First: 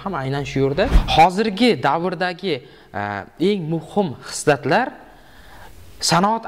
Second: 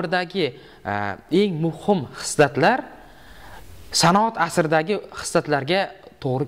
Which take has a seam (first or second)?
first